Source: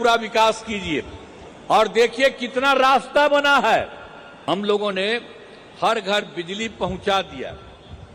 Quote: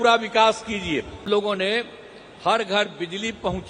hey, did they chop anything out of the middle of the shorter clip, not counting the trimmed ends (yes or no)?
yes